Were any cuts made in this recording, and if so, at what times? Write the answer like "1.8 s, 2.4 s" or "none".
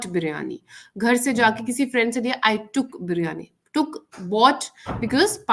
none